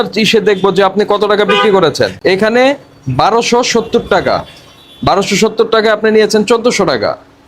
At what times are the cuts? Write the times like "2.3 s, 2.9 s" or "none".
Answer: 2.2 s